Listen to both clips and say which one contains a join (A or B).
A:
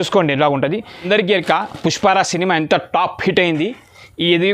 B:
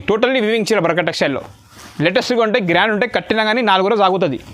A